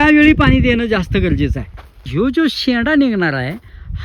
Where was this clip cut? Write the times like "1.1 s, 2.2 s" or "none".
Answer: 2.1 s